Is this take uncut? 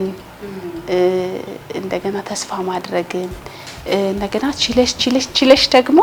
yes; 0 cuts

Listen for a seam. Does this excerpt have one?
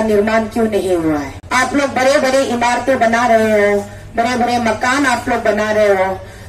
yes; 1 cut; at 1.4 s

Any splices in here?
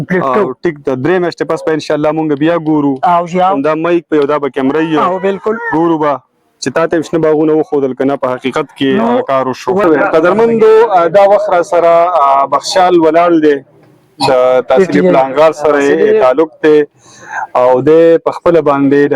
yes; 1 cut; at 9.8 s

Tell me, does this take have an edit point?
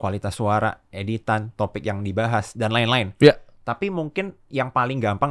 no; 0 cuts

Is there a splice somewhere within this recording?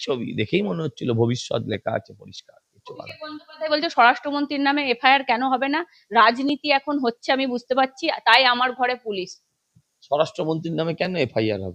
no; 0 cuts

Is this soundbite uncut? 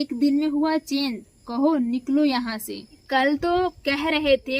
no; 1 cut; at 3.0 s

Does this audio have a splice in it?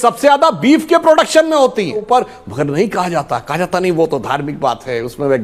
yes; 1 cut; at 2.0 s

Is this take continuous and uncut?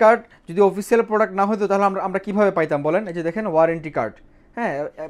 yes; 0 cuts

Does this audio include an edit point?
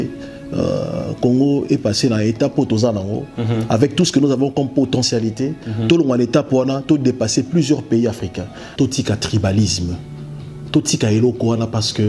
yes; 1 cut; at 8.6 s

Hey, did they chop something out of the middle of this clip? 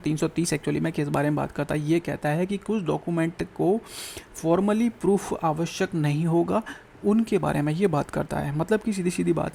no; 0 cuts

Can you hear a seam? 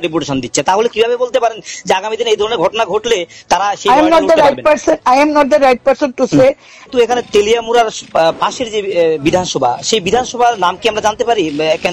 yes; 1 cut; at 6.9 s

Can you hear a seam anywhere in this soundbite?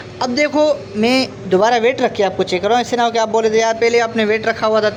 no; 0 cuts

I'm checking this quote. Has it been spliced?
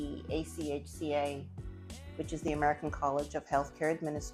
no; 0 cuts

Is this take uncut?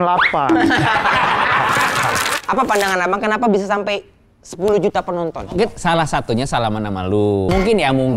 no; 1 cut; at 2.3 s

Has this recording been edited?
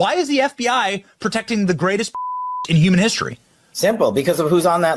yes; 1 cut; at 2.6 s

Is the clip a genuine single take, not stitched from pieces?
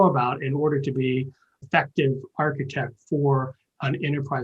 no; 1 cut; at 1.6 s

